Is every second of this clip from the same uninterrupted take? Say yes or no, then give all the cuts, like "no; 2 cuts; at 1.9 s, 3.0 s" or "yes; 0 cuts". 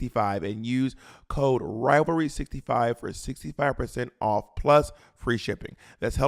yes; 0 cuts